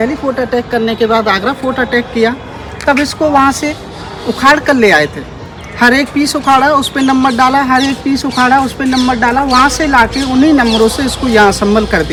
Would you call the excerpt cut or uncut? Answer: uncut